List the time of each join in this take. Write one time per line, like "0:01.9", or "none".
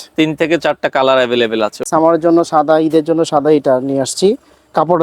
0:01.8